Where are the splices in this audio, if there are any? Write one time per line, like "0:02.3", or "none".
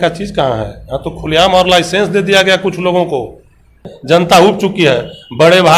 0:03.9